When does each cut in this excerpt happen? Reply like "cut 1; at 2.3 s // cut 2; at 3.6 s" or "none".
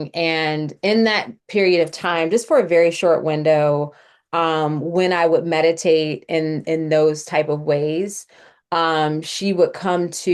none